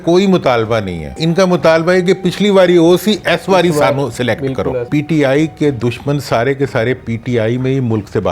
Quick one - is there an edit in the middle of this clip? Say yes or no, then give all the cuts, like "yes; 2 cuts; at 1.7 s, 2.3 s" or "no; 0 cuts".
yes; 2 cuts; at 1.2 s, 4.9 s